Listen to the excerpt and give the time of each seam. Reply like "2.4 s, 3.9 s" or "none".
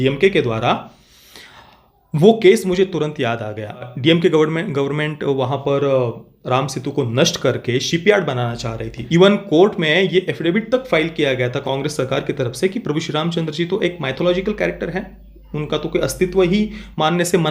3.9 s, 9.0 s, 11.6 s